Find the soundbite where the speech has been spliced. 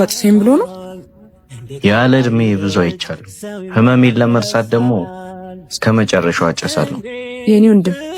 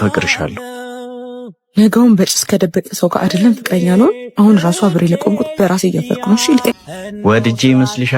second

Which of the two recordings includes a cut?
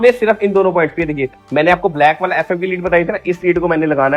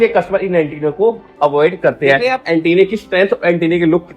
second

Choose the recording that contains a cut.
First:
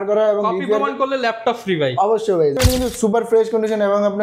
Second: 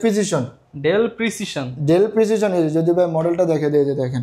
first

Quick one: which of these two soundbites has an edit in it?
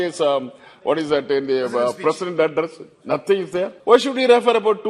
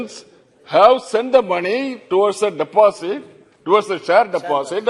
first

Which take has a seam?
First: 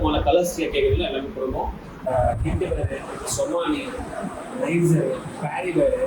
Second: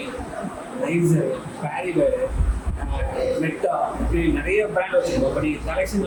first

